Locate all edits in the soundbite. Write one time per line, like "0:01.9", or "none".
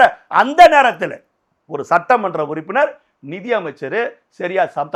none